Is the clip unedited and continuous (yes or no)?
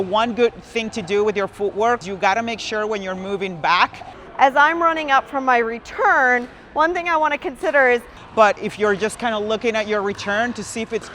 no